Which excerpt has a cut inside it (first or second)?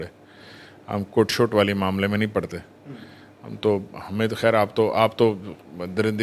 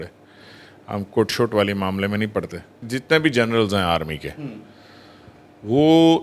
second